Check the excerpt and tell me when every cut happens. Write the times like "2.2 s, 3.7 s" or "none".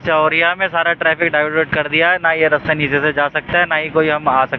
none